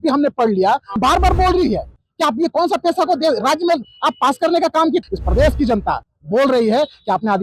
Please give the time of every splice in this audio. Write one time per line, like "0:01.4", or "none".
0:01.0
0:05.0